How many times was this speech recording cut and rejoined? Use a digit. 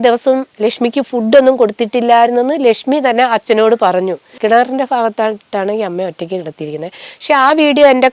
1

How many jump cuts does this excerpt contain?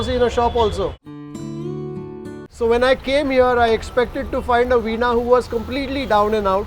1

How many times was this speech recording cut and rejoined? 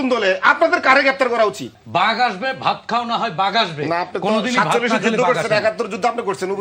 1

